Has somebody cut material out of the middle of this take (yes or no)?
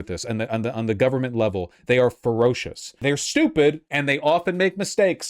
yes